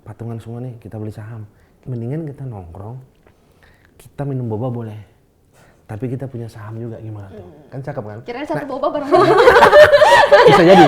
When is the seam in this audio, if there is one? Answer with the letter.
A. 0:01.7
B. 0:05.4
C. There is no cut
A